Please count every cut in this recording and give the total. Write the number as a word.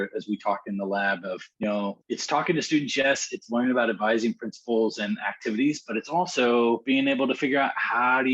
three